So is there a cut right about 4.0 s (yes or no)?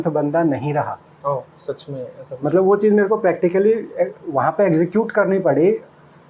no